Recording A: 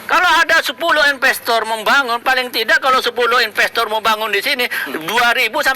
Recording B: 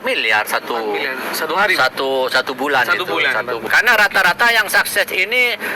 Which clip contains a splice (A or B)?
B